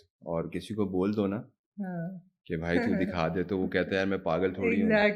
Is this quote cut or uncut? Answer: uncut